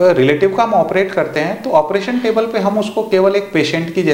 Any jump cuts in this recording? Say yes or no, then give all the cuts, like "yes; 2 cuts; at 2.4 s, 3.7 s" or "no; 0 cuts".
no; 0 cuts